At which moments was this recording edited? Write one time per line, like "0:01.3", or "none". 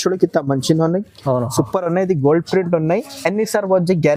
none